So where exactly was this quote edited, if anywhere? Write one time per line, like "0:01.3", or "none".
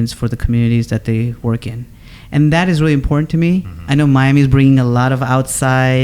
none

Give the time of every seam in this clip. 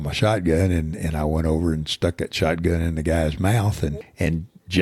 0:03.9

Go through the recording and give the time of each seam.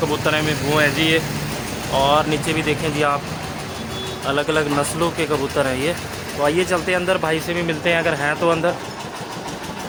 none

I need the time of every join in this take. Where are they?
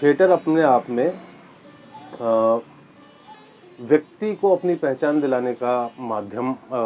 none

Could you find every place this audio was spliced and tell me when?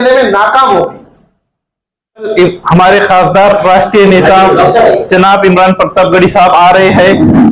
0:02.3

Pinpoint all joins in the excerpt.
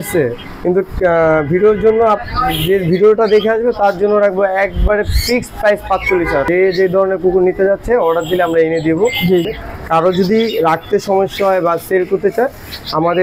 0:06.5
0:09.4

